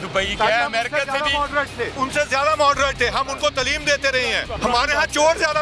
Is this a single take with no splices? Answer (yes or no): no